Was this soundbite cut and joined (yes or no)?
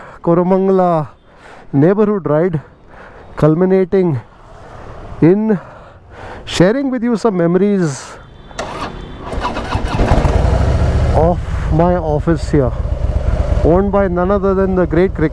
no